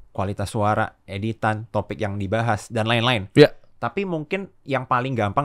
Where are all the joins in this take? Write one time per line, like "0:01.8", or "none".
none